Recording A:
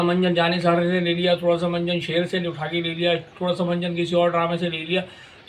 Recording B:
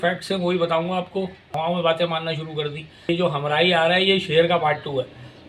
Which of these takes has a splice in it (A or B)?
B